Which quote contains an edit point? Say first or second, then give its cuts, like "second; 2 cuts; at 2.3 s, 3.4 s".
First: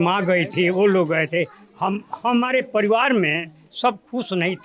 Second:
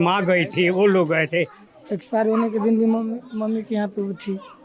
second; 1 cut; at 1.6 s